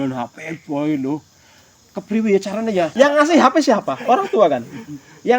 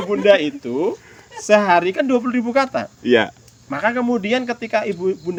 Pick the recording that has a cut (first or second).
first